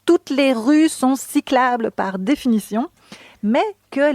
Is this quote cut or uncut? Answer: uncut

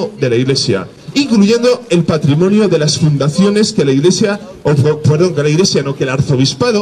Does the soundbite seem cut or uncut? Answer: uncut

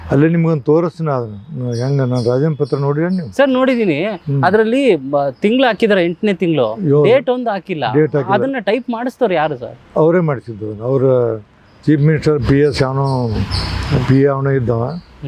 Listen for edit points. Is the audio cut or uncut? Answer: uncut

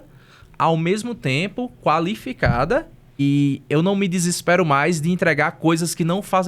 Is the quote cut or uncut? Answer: cut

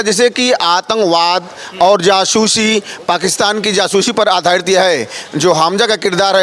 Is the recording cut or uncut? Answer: uncut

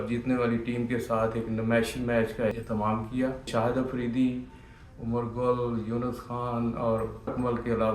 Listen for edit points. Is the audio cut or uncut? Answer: cut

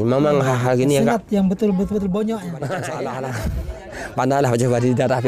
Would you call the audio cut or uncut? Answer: cut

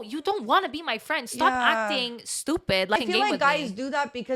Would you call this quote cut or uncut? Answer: cut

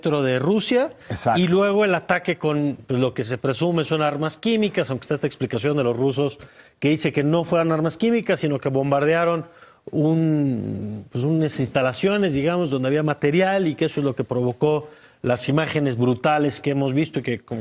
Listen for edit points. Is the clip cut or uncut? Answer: cut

